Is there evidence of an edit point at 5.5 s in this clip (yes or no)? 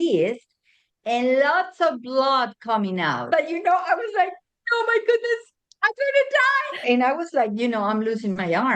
no